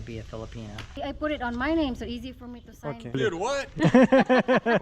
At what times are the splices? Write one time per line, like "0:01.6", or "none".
0:01.0
0:03.2